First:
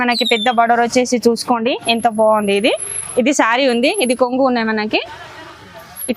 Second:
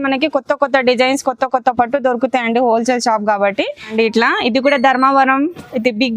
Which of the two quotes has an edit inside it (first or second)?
second